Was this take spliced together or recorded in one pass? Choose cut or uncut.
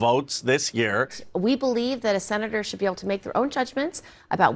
cut